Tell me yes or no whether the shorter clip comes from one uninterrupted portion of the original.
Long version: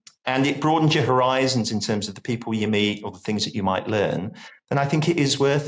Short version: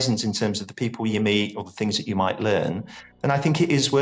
yes